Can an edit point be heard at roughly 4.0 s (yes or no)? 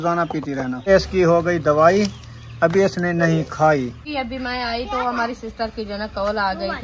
yes